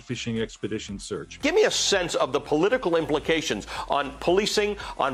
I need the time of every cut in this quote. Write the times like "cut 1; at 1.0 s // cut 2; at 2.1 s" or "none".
none